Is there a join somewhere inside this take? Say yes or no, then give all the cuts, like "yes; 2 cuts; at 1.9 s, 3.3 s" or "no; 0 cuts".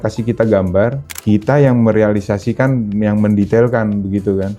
yes; 1 cut; at 1.1 s